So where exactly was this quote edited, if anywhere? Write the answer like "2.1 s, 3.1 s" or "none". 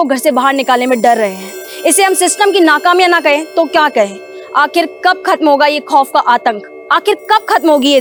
none